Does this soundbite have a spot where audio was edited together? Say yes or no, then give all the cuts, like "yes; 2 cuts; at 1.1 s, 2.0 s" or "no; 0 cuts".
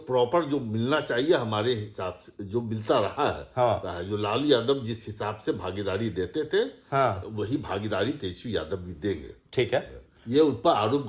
no; 0 cuts